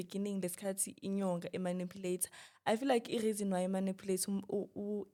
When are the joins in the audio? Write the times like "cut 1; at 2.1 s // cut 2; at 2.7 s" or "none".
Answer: none